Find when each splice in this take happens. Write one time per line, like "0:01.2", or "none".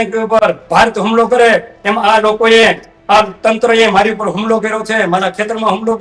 none